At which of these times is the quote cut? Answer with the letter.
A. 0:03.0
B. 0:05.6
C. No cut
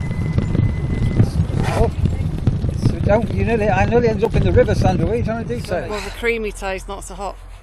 B